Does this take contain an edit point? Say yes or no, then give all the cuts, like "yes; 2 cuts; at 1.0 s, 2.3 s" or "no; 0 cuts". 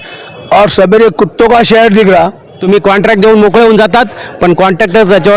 yes; 1 cut; at 2.5 s